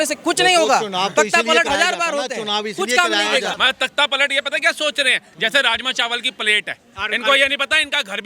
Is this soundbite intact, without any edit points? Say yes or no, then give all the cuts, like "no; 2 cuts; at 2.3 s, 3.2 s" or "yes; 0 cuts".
no; 1 cut; at 3.6 s